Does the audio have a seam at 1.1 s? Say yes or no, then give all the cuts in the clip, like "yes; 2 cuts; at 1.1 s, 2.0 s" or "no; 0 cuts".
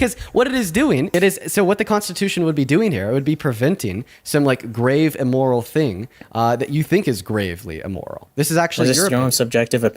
yes; 2 cuts; at 1.1 s, 8.2 s